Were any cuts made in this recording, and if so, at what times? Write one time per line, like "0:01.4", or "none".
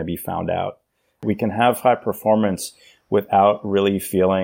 0:01.2